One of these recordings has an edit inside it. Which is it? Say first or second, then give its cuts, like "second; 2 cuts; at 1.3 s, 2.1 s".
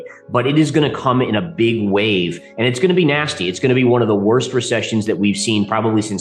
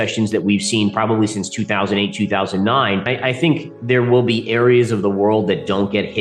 second; 1 cut; at 3.0 s